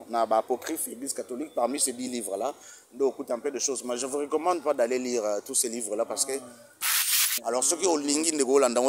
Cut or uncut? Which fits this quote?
cut